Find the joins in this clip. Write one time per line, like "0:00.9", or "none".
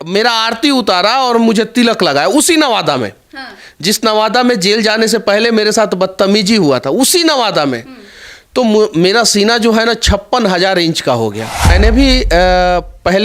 0:11.7